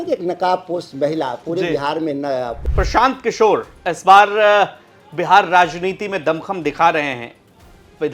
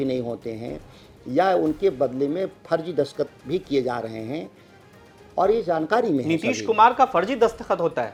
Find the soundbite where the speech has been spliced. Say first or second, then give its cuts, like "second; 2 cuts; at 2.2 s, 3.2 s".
first; 1 cut; at 2.5 s